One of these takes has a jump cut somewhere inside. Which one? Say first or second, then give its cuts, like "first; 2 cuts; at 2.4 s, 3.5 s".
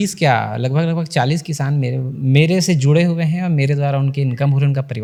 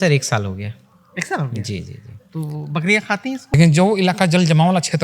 second; 1 cut; at 3.5 s